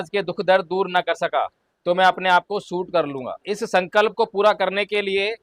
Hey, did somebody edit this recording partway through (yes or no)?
yes